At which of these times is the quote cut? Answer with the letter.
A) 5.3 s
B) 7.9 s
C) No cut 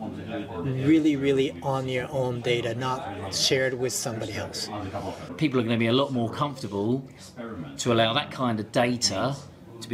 A